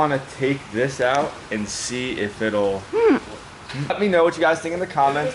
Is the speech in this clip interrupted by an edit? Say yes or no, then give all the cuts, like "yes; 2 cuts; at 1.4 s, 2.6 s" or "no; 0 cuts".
yes; 1 cut; at 3.8 s